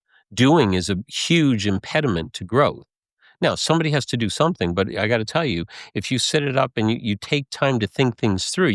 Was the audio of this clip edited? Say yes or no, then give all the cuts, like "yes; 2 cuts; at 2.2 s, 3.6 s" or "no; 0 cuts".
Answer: no; 0 cuts